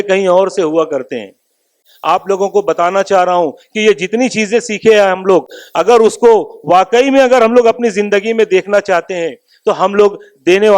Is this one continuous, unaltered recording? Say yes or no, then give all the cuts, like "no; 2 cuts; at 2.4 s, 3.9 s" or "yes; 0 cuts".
no; 1 cut; at 1.8 s